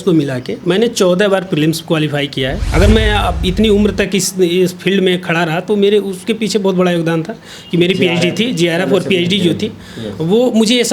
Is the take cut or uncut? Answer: cut